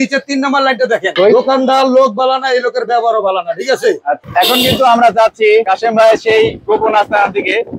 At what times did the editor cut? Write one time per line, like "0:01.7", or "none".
0:01.1
0:04.2